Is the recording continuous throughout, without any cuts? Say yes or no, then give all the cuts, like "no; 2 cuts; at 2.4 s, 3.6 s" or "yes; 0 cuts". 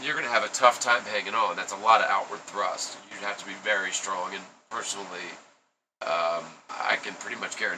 yes; 0 cuts